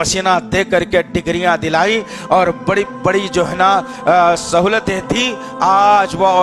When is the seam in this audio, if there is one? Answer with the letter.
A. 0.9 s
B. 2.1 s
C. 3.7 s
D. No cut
D